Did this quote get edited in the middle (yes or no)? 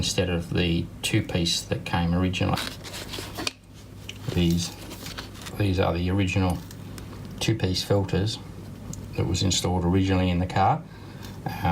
yes